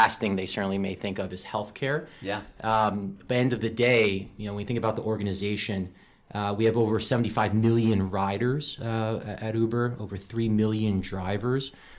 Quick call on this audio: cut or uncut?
uncut